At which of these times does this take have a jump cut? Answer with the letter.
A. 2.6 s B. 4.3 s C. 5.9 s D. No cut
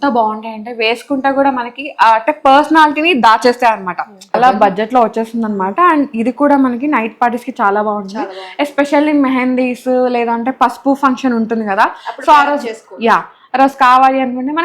B